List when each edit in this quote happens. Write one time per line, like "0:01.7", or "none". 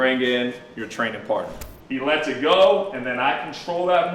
0:01.6